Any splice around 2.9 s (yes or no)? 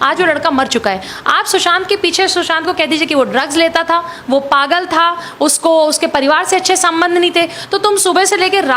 no